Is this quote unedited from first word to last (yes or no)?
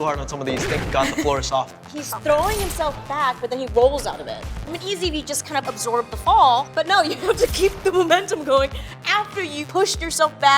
no